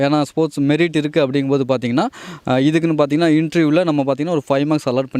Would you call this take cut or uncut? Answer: uncut